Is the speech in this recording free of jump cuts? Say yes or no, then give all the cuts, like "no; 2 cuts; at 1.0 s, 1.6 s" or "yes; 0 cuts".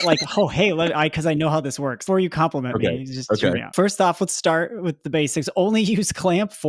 no; 2 cuts; at 2.0 s, 3.7 s